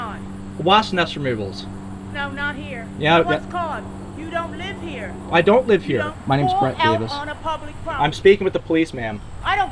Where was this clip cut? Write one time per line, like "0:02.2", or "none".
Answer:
0:06.1